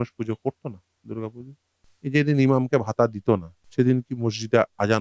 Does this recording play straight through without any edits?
no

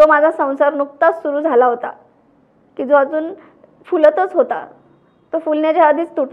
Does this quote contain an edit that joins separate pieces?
no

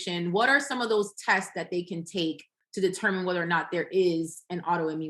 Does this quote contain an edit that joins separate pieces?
no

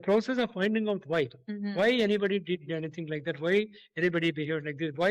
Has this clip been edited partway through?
no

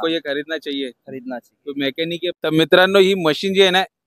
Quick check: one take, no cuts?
no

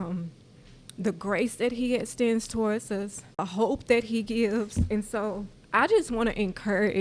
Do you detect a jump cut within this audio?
yes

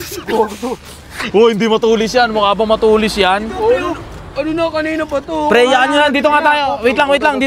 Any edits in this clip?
no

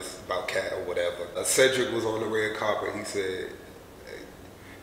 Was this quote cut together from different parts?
yes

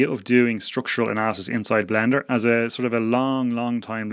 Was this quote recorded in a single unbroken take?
yes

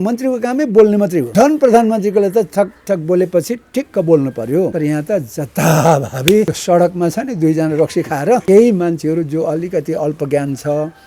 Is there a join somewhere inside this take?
yes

